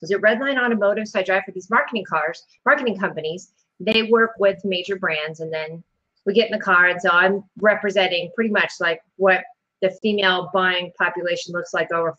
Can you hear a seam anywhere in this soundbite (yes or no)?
no